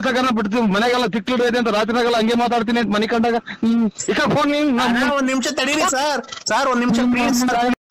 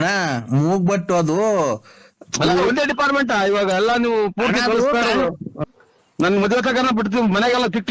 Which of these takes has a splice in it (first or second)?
second